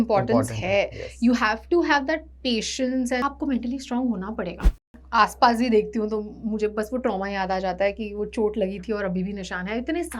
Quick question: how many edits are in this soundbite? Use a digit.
2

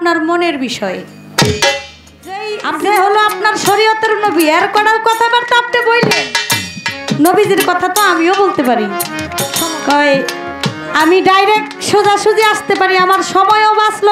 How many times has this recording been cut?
2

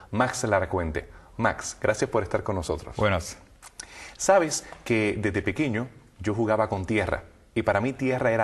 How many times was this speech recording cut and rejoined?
1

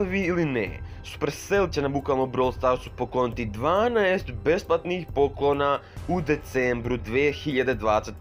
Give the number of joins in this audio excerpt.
0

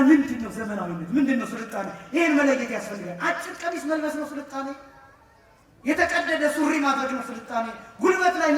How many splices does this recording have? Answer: 0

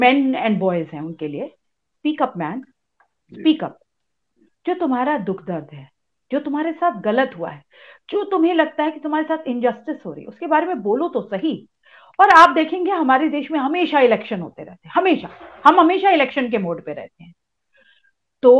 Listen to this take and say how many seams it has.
0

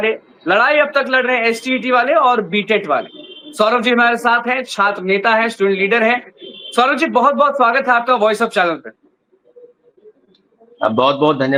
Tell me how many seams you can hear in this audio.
0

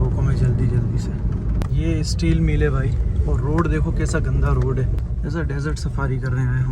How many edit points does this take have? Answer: 2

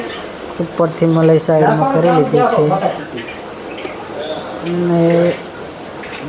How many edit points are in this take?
0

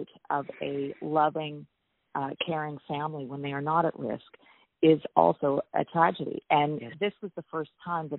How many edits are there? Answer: 1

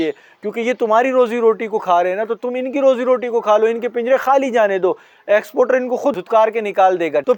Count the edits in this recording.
0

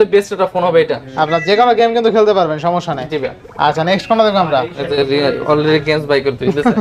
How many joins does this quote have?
0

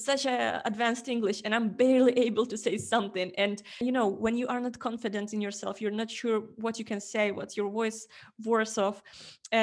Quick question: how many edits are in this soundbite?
1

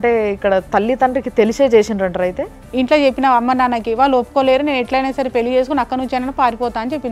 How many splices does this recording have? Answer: 1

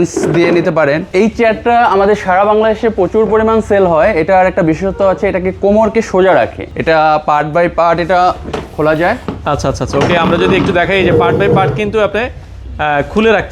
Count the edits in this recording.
2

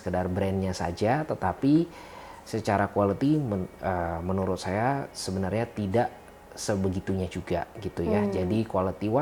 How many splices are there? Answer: 0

